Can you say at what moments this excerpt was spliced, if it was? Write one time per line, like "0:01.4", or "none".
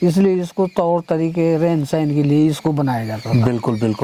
none